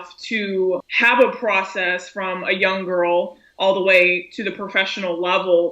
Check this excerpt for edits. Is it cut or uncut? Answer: cut